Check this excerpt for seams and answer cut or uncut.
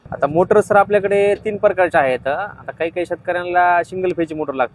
uncut